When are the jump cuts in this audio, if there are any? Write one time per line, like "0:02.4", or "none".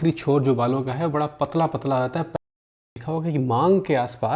0:02.4